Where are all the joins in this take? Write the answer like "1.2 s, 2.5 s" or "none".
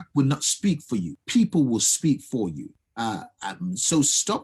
1.2 s, 2.8 s

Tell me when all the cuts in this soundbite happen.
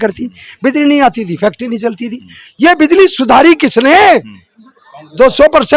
none

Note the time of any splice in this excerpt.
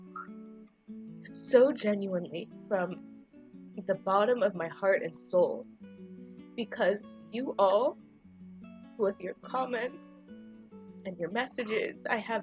1.5 s

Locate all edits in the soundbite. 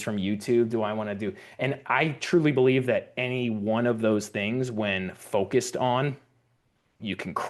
none

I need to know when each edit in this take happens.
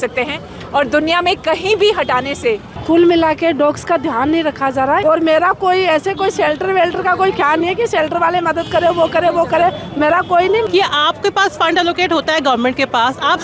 2.7 s, 5.0 s, 10.6 s

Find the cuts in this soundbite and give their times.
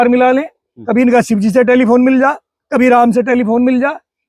none

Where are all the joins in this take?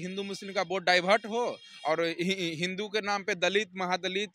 none

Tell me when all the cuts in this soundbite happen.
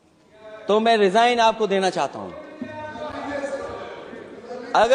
none

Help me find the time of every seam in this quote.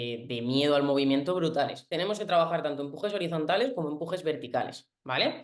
1.8 s

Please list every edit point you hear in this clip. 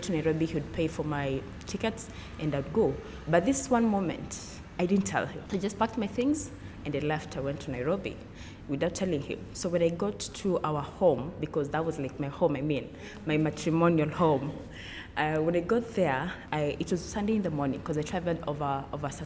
none

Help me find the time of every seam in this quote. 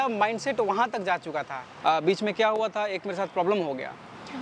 1.6 s

